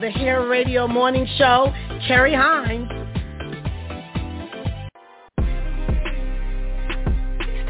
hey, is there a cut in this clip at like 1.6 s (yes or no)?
no